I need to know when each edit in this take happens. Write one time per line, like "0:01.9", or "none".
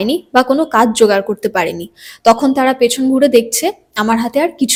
none